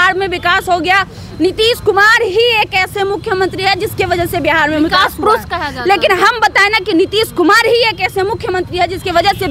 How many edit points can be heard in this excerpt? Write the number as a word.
zero